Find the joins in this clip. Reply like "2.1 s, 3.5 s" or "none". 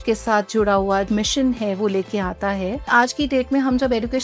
1.1 s, 2.9 s